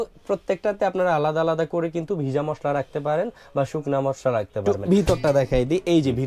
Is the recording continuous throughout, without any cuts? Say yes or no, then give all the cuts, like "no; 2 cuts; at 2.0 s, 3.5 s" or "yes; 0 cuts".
no; 1 cut; at 4.6 s